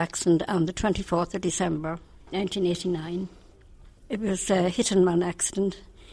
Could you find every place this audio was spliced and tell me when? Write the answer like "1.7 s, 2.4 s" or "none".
none